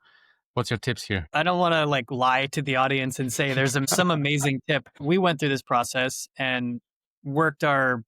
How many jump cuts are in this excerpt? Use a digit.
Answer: 3